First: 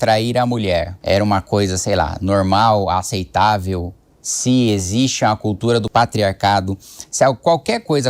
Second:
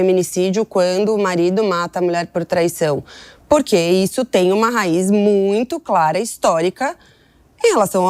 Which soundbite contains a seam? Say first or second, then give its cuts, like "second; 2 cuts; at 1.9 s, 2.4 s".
first; 2 cuts; at 0.9 s, 5.9 s